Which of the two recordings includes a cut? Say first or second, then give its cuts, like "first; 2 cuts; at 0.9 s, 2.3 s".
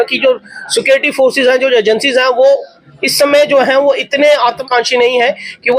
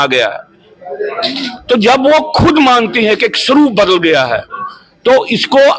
first; 1 cut; at 4.6 s